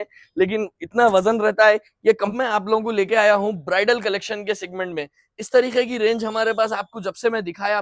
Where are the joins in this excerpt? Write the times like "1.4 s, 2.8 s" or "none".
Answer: 2.3 s